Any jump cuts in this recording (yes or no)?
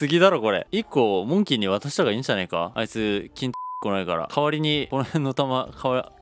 no